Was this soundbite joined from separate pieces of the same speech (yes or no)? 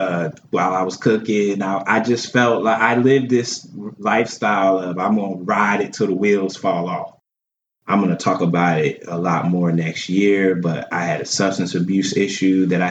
yes